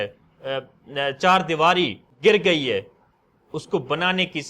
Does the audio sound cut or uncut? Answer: cut